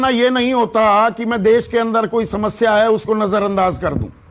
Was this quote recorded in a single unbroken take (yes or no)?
yes